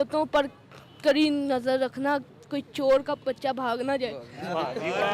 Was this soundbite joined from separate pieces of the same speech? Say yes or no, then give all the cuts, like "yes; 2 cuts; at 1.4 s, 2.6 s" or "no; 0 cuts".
no; 0 cuts